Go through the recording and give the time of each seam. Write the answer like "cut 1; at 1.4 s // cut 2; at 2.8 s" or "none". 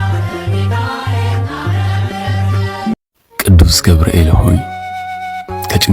cut 1; at 2.9 s